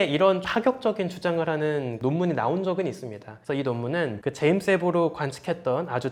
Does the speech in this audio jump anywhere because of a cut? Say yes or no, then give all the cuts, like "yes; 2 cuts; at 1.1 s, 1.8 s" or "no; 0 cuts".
no; 0 cuts